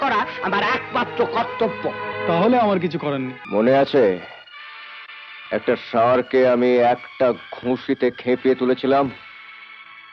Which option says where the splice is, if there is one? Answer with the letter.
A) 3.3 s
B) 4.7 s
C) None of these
A